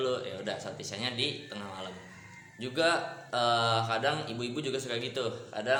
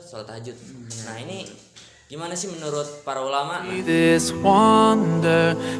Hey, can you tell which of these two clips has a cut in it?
second; 1 cut; at 3.8 s

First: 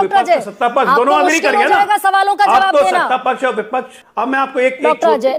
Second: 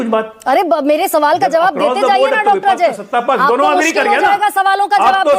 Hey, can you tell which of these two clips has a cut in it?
first; 1 cut; at 4.0 s

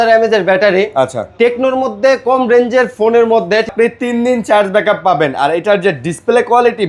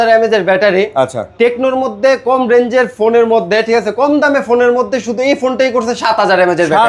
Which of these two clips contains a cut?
first; 1 cut; at 3.7 s

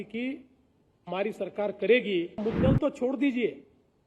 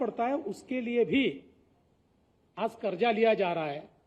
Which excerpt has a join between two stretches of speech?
first; 1 cut; at 2.4 s

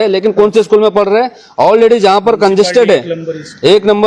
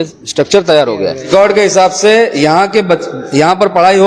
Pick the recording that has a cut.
second; 1 cut; at 1.2 s

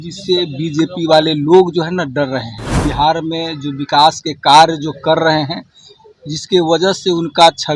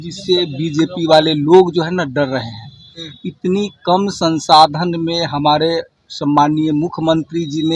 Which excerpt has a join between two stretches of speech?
first; 1 cut; at 2.8 s

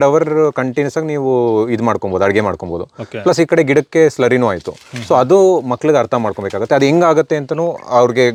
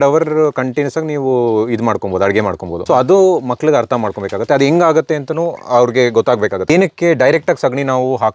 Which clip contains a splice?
second; 2 cuts; at 2.7 s, 6.6 s

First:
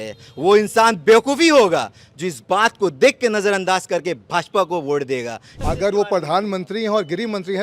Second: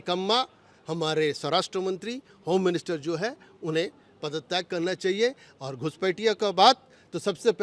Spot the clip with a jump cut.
first; 1 cut; at 5.5 s

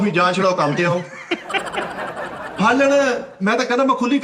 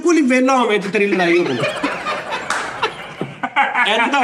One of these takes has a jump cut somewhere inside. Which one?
first; 1 cut; at 2.5 s

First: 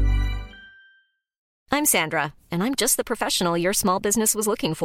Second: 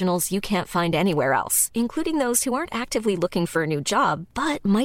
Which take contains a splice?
first; 1 cut; at 1.5 s

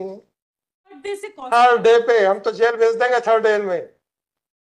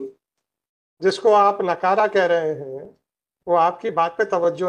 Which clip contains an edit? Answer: first; 1 cut; at 1.0 s

